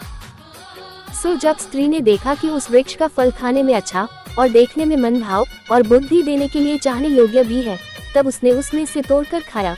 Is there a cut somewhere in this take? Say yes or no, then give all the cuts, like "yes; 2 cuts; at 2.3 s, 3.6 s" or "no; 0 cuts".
yes; 1 cut; at 1.2 s